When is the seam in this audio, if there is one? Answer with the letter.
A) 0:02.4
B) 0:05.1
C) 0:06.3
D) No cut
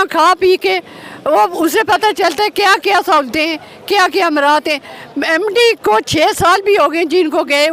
D